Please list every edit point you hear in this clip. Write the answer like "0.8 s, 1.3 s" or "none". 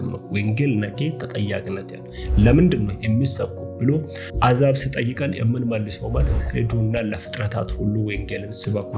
none

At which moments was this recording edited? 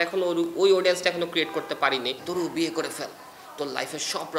2.2 s

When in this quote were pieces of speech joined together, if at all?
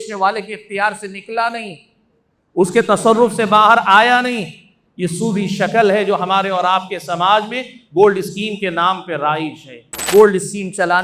10.0 s

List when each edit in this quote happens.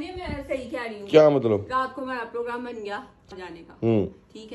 3.2 s

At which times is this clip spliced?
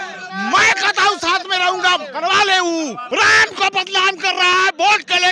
3.0 s

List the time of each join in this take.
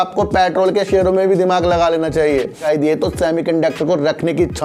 2.6 s

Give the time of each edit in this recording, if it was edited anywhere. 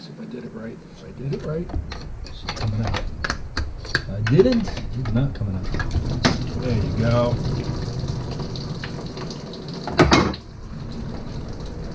none

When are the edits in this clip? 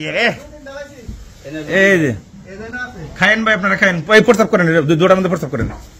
none

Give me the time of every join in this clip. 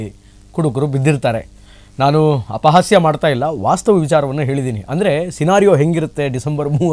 none

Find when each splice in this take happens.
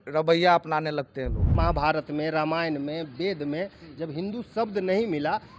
1.4 s

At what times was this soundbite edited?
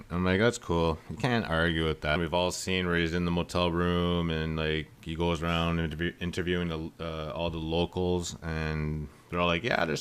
none

